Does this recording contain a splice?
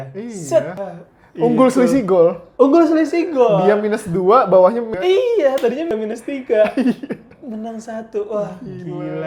no; 0 cuts

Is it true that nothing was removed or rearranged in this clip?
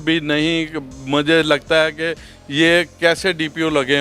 yes; 0 cuts

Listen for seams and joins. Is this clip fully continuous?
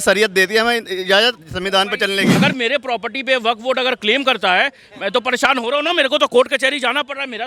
no; 1 cut; at 2.3 s

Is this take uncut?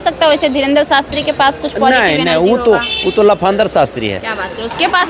yes; 0 cuts

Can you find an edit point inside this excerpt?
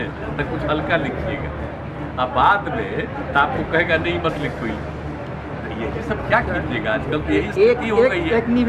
no; 0 cuts

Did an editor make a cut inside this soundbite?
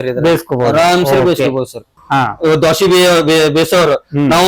yes; 1 cut; at 1.9 s

